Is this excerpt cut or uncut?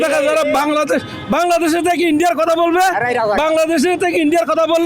uncut